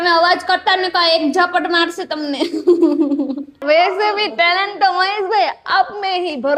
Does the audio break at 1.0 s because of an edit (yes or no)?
no